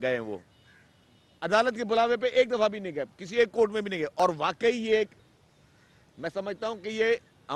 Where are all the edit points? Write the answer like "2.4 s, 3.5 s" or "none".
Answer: 4.1 s